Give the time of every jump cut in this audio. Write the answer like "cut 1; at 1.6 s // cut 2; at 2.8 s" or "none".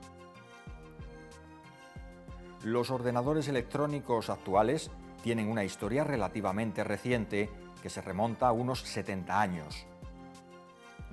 cut 1; at 9.7 s